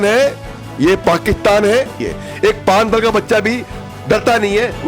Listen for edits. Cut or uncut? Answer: cut